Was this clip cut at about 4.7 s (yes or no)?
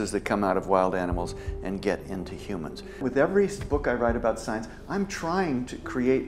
no